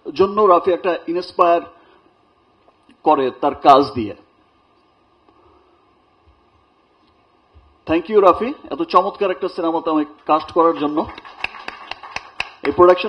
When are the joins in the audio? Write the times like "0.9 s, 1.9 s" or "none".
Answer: none